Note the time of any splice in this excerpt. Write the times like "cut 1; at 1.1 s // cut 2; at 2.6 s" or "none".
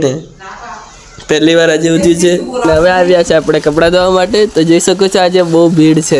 cut 1; at 2.6 s